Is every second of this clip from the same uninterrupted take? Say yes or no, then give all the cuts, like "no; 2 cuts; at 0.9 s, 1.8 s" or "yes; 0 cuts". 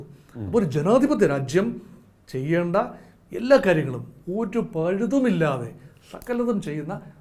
yes; 0 cuts